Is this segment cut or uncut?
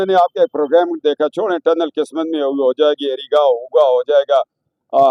uncut